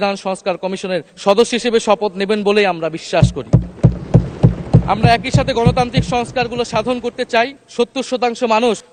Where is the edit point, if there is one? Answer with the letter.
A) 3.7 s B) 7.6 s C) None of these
C